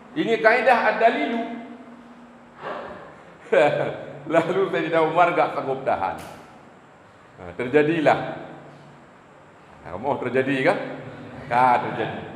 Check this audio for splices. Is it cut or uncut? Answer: cut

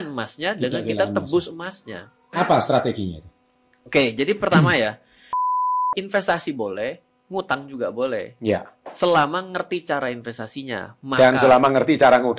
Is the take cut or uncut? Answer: cut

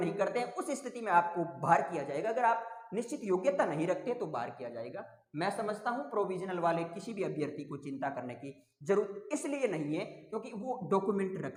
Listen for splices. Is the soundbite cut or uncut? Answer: uncut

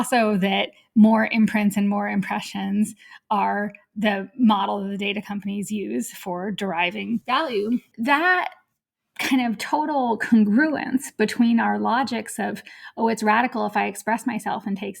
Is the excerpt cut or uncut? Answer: cut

